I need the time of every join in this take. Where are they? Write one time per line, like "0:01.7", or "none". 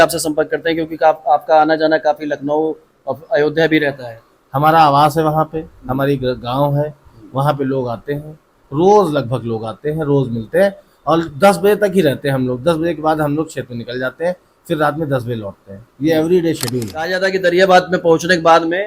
0:17.1